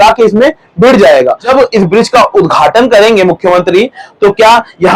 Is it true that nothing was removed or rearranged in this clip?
no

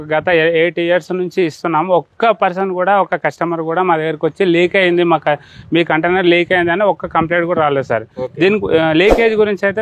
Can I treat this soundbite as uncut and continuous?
yes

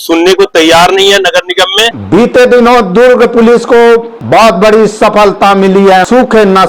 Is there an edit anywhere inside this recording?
yes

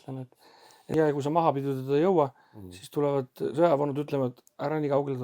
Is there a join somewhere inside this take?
yes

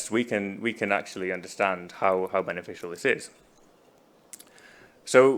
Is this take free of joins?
yes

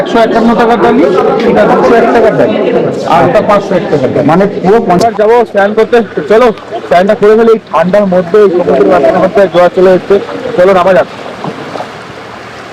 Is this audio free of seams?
no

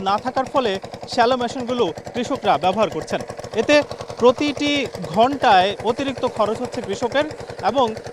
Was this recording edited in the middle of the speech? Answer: yes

